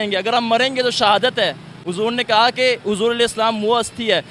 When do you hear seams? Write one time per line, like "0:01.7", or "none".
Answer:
none